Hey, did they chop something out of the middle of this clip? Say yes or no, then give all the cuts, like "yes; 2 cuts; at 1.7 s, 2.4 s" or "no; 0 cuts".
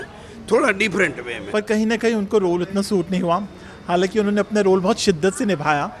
yes; 1 cut; at 1.4 s